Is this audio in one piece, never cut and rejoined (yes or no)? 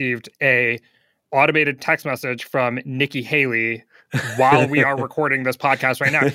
yes